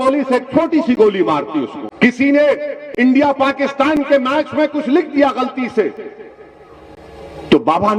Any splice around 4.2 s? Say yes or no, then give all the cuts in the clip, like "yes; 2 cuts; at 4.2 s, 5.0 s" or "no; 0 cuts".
no; 1 cut; at 1.8 s